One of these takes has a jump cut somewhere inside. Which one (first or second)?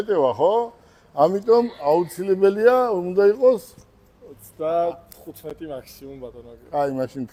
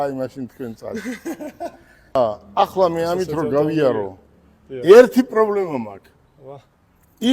second